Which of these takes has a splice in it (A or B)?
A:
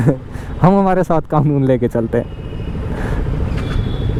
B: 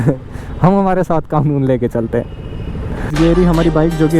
B